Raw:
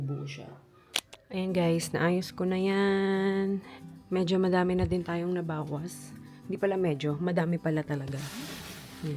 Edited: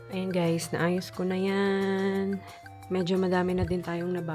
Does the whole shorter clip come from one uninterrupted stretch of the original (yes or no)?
yes